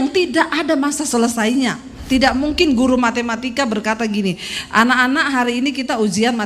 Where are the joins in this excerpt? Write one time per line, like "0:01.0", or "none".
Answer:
0:02.0